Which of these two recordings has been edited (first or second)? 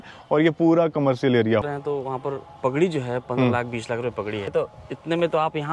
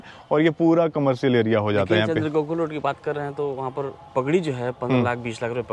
first